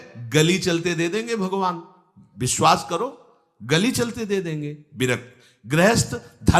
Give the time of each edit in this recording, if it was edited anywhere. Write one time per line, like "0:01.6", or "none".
none